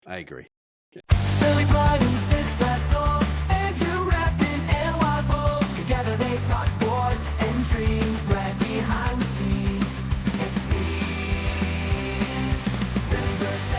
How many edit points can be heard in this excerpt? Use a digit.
1